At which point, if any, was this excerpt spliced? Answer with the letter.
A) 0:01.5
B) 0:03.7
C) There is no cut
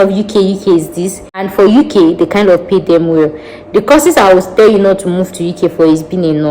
A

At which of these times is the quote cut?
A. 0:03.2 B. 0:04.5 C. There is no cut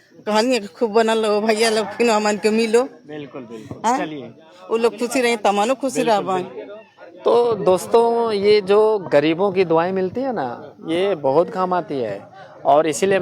C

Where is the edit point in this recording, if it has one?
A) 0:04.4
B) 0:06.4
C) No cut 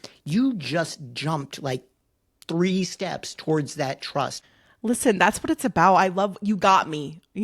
A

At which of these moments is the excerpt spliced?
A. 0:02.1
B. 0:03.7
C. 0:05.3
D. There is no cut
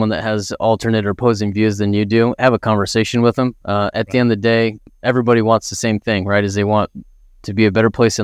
D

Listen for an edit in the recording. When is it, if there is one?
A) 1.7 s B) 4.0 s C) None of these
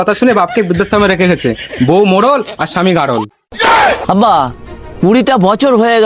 B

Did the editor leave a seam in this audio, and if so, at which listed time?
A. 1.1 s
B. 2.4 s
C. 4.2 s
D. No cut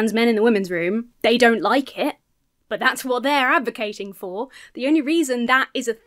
A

